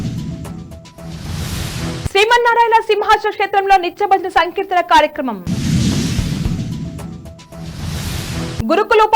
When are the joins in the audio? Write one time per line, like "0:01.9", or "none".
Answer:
0:01.4

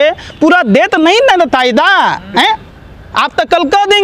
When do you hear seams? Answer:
none

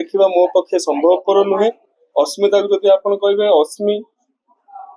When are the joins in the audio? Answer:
none

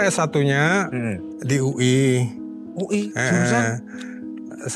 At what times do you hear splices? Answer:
0:01.3

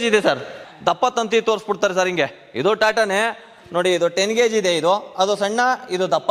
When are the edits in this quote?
none

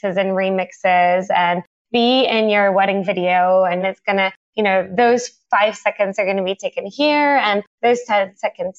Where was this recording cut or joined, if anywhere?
0:03.8

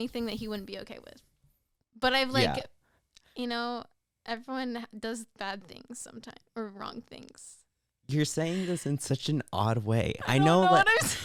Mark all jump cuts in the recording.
none

